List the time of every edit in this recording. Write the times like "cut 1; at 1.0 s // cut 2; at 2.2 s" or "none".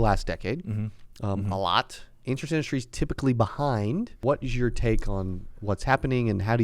cut 1; at 4.1 s